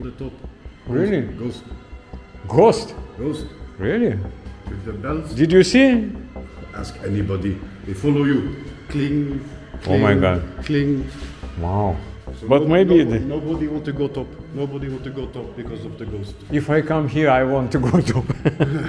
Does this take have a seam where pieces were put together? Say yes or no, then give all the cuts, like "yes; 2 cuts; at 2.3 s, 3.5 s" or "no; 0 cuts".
no; 0 cuts